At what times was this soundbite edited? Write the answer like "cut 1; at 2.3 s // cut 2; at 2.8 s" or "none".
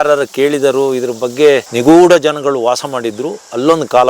cut 1; at 1.7 s